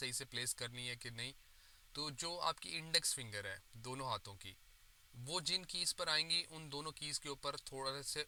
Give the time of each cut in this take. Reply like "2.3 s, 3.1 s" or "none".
none